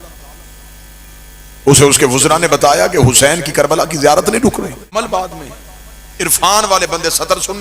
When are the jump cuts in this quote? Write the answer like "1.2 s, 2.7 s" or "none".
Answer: 4.9 s